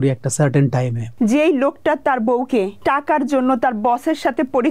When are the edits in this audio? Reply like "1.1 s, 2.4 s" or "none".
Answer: 1.0 s, 2.7 s